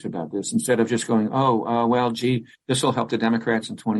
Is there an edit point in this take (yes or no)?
no